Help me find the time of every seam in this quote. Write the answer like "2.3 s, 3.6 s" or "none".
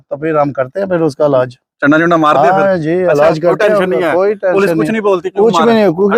none

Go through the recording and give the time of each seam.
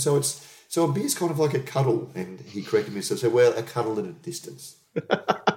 none

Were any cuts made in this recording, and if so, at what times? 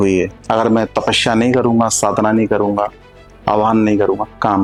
none

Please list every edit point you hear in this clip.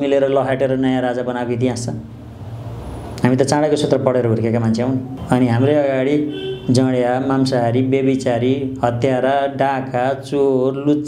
none

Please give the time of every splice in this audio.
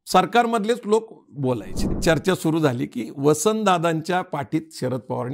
1.9 s

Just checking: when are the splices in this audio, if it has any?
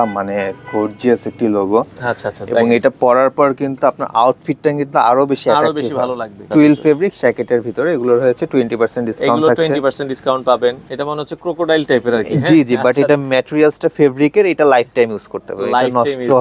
6.4 s, 10.8 s

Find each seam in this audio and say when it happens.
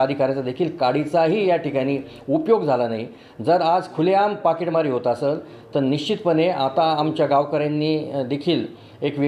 none

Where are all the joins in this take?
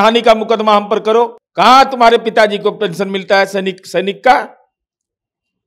1.4 s

